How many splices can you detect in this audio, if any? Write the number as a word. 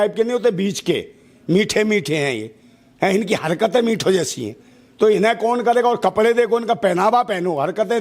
zero